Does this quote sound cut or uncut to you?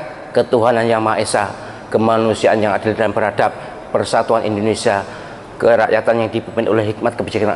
uncut